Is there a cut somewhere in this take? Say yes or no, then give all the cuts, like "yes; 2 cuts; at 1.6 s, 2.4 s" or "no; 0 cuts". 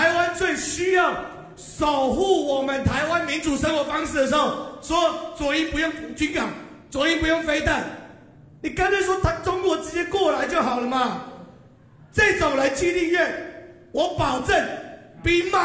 no; 0 cuts